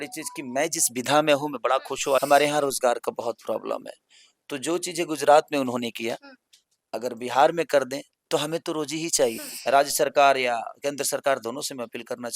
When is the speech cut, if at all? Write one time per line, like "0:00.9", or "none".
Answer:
0:02.2
0:09.4